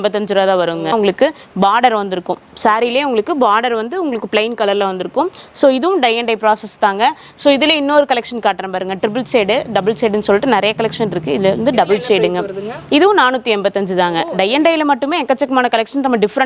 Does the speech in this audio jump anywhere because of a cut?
yes; 1 cut; at 0.9 s

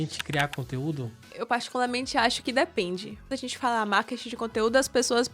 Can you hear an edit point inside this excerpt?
yes; 2 cuts; at 1.3 s, 3.2 s

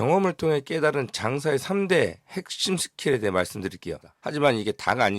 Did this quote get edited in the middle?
yes; 1 cut; at 4.1 s

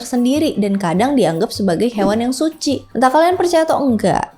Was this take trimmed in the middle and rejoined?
yes; 1 cut; at 2.9 s

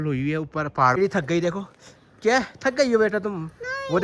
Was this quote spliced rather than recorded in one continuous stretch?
yes; 1 cut; at 0.9 s

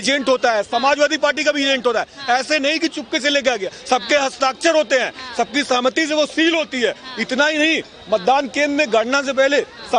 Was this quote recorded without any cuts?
yes; 0 cuts

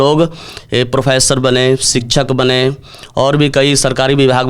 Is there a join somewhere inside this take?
no; 0 cuts

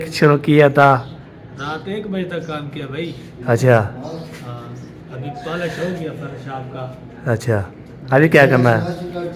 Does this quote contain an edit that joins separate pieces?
no; 0 cuts

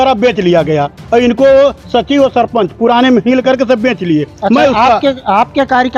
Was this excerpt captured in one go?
yes; 0 cuts

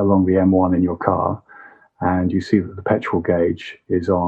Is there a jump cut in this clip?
no; 0 cuts

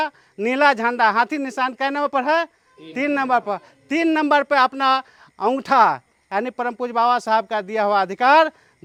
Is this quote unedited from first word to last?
yes; 0 cuts

